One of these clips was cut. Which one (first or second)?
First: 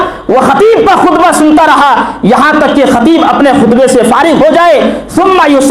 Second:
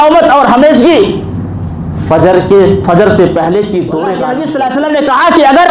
second